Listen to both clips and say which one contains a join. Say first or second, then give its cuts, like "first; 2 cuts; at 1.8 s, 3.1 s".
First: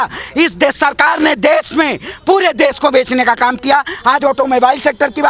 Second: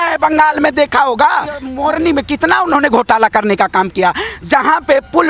second; 1 cut; at 1.7 s